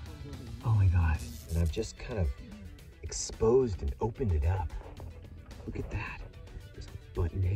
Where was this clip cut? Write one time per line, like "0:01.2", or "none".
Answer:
0:01.4